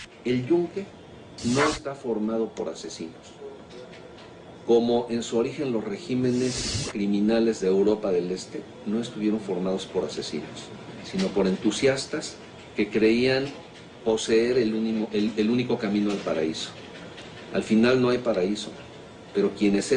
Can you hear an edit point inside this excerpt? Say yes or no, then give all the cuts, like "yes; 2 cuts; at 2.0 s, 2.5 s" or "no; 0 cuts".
yes; 1 cut; at 7.4 s